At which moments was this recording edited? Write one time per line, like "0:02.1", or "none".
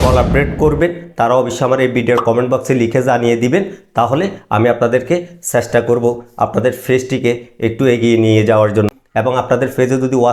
none